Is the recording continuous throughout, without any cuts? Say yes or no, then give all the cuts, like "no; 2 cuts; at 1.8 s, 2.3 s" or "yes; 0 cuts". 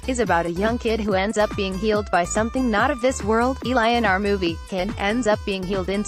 yes; 0 cuts